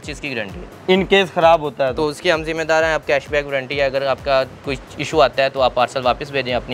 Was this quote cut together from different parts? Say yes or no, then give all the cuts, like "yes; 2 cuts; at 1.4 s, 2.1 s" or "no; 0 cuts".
no; 0 cuts